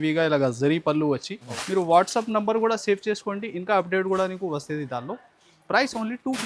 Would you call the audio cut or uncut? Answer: cut